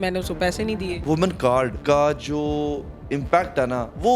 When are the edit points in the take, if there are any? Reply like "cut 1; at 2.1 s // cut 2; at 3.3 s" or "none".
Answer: cut 1; at 0.9 s // cut 2; at 1.8 s